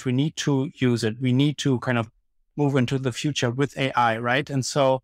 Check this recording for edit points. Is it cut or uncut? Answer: uncut